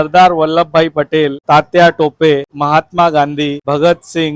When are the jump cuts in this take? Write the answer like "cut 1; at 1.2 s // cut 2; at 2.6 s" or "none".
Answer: cut 1; at 1.4 s // cut 2; at 2.5 s // cut 3; at 3.6 s